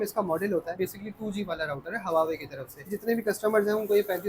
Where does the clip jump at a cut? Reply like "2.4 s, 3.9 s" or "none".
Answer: 0.7 s, 2.9 s